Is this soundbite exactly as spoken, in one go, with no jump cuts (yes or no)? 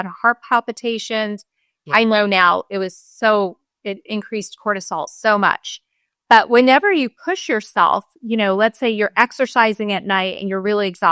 yes